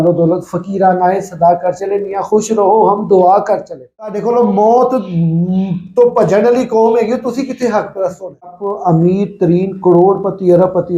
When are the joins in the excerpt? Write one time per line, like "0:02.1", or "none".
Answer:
0:04.2
0:08.7